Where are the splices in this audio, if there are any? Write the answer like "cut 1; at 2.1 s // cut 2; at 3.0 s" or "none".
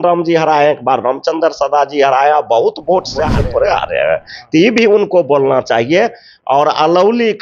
cut 1; at 3.3 s